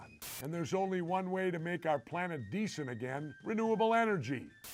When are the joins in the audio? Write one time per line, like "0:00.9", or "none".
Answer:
none